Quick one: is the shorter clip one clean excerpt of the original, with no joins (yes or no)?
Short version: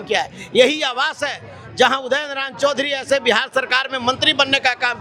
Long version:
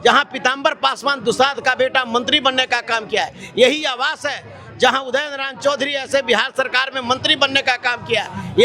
yes